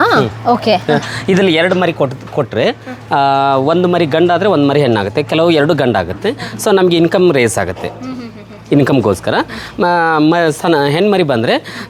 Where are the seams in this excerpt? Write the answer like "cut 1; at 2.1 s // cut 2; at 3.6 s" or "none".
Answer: none